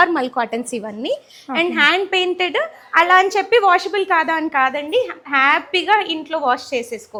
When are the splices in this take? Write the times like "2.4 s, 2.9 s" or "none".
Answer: none

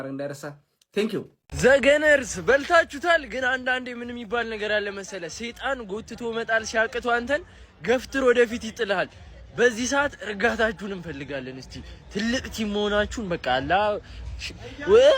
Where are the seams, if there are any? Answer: 1.4 s

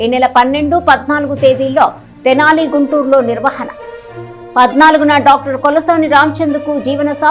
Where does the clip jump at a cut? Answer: none

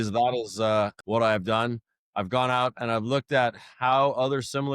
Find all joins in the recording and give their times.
1.0 s

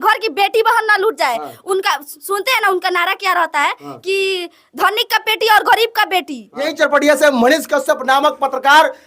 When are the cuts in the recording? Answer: 6.7 s

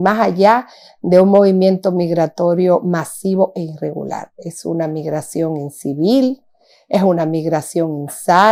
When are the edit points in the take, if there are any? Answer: none

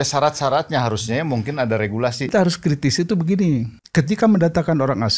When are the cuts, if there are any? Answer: 2.3 s, 3.8 s

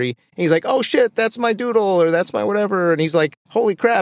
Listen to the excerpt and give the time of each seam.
none

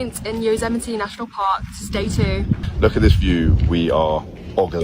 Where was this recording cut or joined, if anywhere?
2.6 s

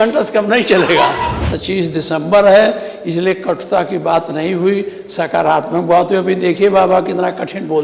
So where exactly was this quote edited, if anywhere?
1.5 s

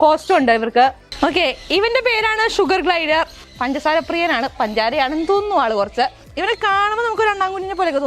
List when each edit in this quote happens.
1.0 s, 6.3 s

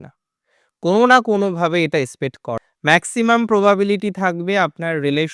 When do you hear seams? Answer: 2.6 s

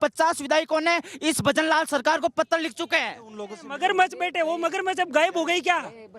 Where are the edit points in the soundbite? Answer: 3.6 s

